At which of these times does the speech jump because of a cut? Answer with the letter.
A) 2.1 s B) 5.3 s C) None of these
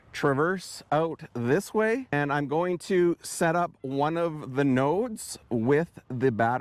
A